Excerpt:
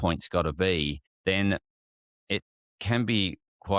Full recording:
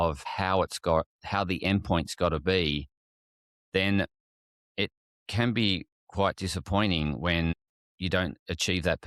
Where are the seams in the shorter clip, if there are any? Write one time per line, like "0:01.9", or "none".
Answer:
0:01.1